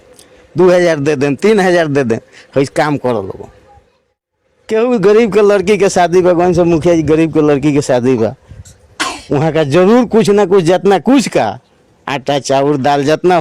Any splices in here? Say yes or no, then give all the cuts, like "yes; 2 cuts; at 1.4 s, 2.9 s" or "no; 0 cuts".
no; 0 cuts